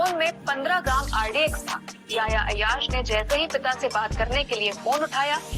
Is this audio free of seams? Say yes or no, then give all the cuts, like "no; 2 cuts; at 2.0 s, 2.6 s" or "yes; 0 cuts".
yes; 0 cuts